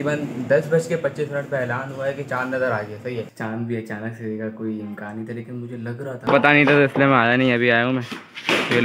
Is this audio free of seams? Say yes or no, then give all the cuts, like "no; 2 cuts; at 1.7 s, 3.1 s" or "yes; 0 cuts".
no; 2 cuts; at 3.3 s, 6.3 s